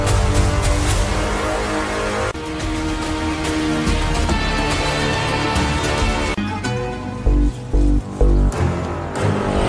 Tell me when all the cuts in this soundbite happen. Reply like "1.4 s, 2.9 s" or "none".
6.3 s